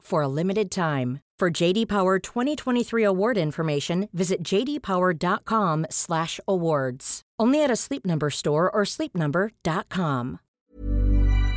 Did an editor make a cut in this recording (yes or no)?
yes